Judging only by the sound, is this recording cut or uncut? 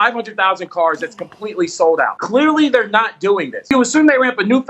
cut